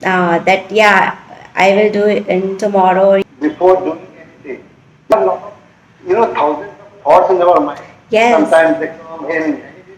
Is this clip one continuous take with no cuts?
no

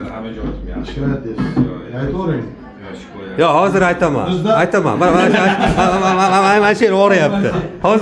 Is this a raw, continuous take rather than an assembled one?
yes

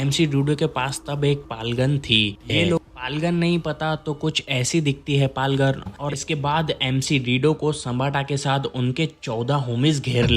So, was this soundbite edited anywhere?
yes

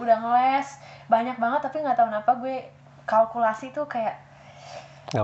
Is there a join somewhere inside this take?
no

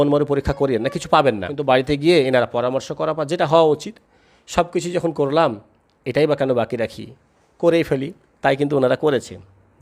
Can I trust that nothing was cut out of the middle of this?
no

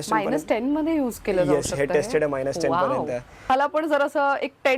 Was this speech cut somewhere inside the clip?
yes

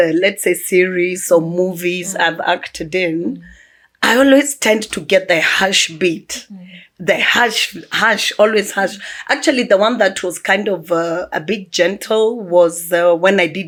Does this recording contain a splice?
no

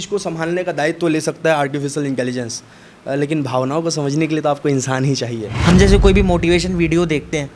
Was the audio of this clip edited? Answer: yes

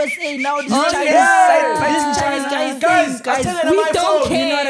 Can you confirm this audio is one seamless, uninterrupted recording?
yes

